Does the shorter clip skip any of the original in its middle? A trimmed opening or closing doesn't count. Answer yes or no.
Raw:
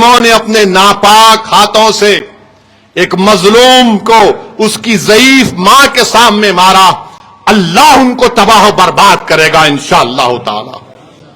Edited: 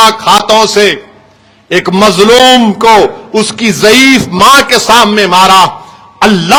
no